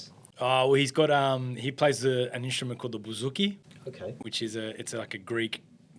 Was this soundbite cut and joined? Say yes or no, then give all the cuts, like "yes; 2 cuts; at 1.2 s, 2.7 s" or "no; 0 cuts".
no; 0 cuts